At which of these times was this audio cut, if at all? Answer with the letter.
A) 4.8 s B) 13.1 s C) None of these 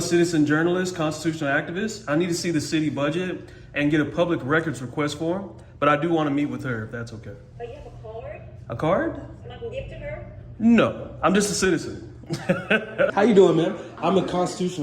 B